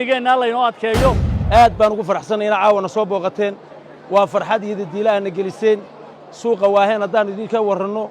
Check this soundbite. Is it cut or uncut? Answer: cut